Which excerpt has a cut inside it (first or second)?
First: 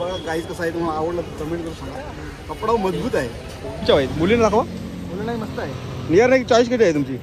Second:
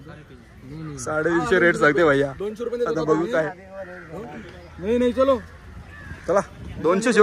first